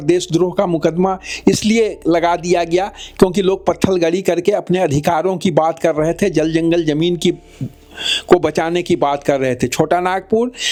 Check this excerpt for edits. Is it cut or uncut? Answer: uncut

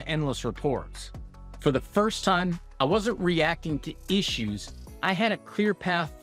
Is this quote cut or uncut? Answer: uncut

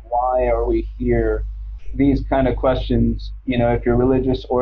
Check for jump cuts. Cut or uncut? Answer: cut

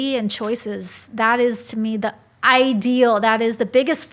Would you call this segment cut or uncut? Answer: uncut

